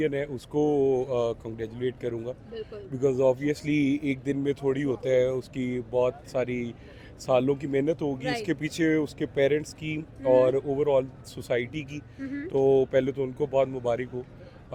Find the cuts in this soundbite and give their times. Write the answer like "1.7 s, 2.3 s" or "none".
none